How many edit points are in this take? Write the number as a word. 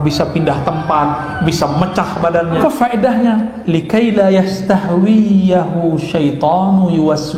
one